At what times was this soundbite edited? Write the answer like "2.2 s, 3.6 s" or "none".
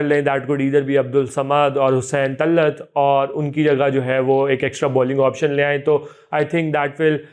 none